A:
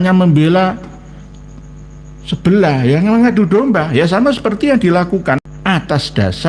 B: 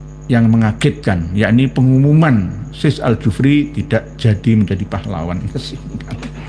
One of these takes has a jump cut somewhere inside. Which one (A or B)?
A